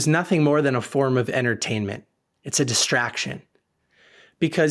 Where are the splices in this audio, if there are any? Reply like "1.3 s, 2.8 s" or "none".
none